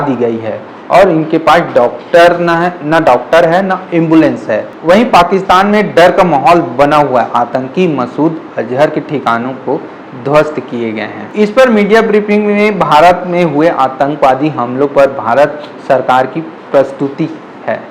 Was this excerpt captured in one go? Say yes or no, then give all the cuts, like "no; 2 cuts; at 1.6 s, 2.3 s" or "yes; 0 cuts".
yes; 0 cuts